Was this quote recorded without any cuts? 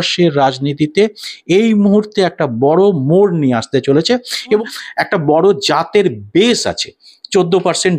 no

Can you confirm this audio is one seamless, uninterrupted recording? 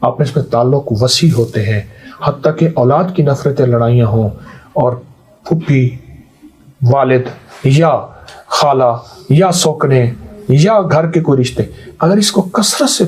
yes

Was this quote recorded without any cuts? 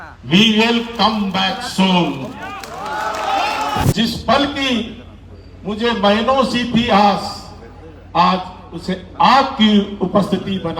no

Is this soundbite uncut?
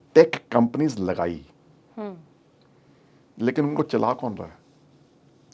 yes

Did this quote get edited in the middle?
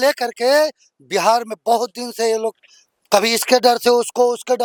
no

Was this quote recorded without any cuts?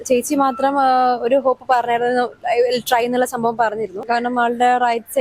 no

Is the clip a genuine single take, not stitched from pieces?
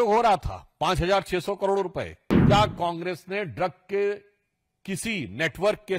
no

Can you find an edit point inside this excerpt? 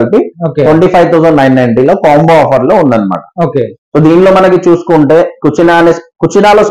no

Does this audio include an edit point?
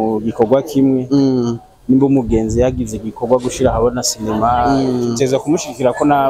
no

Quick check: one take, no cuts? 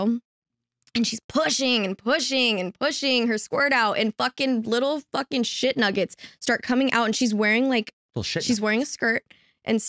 yes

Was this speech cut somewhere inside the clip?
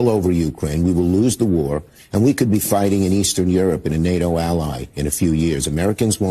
no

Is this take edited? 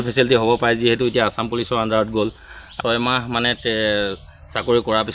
yes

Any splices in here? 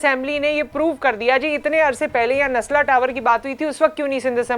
no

